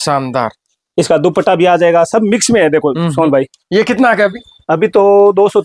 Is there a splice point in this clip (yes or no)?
no